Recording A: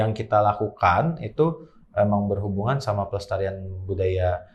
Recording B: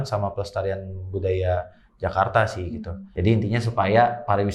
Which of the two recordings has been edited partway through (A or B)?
B